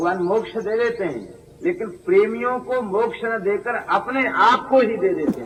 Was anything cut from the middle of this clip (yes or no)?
no